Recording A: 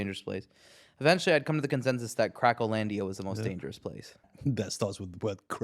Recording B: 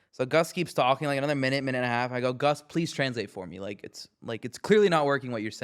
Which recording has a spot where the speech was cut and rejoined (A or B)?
A